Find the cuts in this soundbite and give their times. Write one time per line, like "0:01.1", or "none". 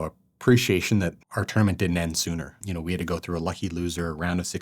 0:01.2
0:02.6